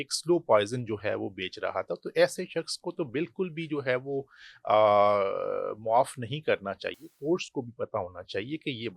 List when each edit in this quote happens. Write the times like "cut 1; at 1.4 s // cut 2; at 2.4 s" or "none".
none